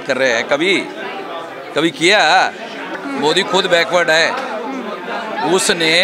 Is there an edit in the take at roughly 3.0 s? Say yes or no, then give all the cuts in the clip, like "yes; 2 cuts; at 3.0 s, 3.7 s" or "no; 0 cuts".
yes; 1 cut; at 3.0 s